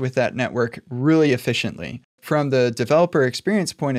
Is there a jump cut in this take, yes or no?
yes